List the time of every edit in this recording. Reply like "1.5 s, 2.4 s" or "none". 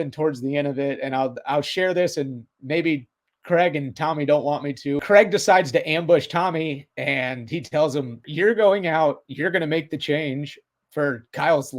5.0 s, 8.3 s